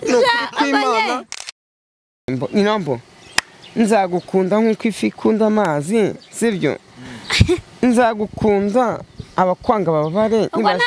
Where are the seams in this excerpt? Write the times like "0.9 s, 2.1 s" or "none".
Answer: 2.3 s